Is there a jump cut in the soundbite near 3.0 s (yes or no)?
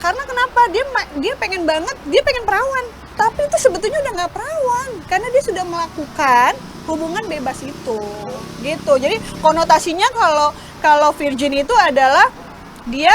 yes